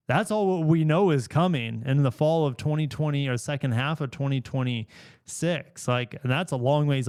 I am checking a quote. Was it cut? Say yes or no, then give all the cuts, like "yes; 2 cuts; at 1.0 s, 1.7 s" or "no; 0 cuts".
no; 0 cuts